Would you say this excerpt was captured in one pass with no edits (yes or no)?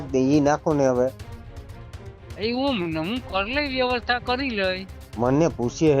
yes